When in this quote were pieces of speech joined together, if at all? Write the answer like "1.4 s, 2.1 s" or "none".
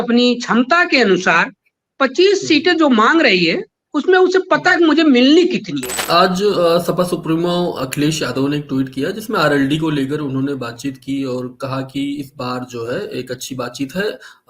6.0 s